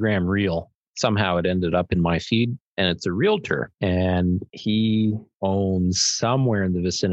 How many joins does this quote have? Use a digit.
4